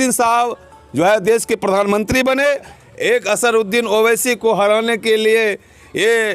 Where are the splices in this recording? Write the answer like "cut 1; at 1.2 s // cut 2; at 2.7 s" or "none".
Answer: cut 1; at 2.7 s

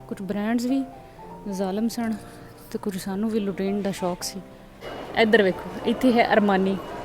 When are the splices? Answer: cut 1; at 5.0 s

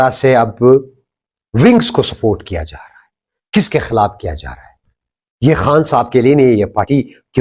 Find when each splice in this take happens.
none

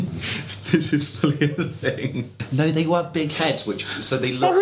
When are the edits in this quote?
cut 1; at 2.4 s

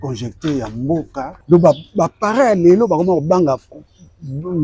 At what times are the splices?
cut 1; at 1.4 s

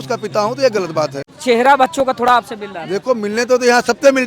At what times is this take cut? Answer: cut 1; at 1.3 s

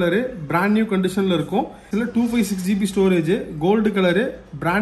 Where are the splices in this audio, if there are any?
cut 1; at 1.9 s

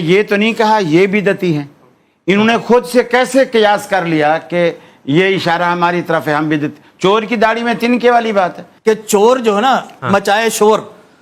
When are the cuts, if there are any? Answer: cut 1; at 8.7 s

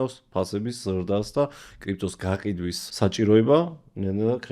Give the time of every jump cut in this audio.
cut 1; at 2.8 s

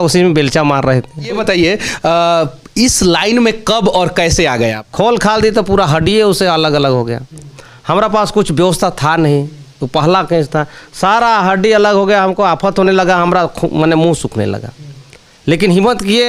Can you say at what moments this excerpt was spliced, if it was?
cut 1; at 1.4 s // cut 2; at 4.8 s

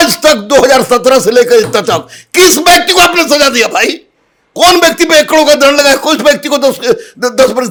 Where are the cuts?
none

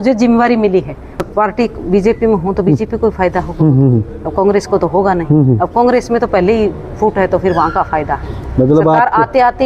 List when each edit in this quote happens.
cut 1; at 1.2 s

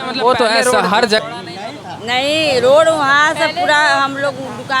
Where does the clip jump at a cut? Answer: cut 1; at 1.2 s

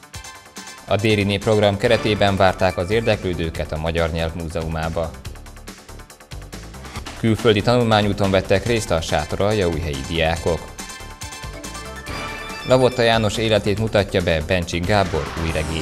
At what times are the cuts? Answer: cut 1; at 0.9 s // cut 2; at 5.1 s // cut 3; at 7.0 s // cut 4; at 10.7 s // cut 5; at 12.7 s

